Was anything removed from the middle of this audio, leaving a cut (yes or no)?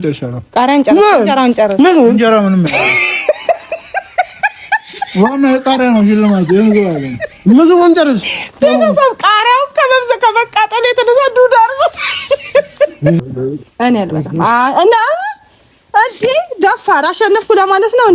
yes